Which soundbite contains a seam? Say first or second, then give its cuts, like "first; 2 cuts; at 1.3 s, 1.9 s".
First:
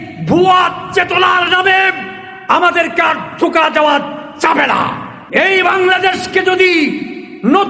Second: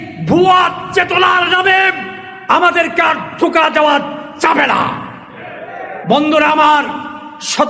first; 1 cut; at 5.1 s